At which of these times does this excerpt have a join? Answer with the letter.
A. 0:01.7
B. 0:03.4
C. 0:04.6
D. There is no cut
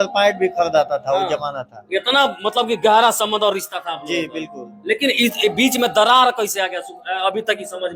D